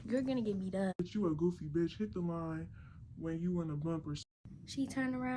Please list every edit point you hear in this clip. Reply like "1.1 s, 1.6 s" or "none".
1.0 s, 4.2 s